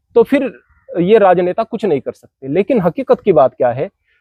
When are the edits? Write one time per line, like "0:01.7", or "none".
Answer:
none